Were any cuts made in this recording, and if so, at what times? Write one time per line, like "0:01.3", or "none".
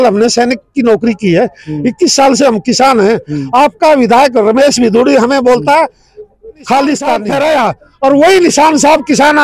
0:07.3